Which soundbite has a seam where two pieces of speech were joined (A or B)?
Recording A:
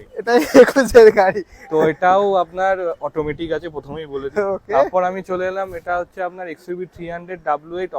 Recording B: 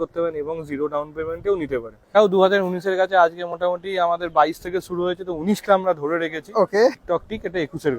B